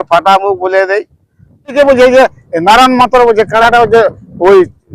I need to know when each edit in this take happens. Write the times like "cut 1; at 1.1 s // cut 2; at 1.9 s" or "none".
cut 1; at 1.7 s